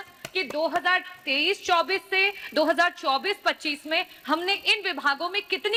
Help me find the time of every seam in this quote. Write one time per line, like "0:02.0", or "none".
none